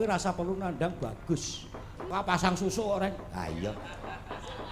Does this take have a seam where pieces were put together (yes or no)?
yes